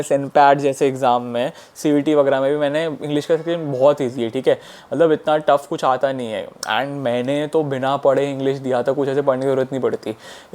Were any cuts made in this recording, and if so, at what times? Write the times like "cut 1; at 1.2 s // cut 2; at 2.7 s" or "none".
none